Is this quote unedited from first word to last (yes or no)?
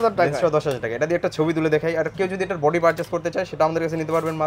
yes